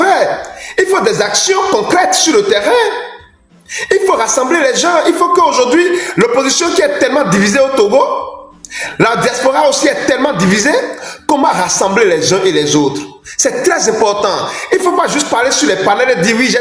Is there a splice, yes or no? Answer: no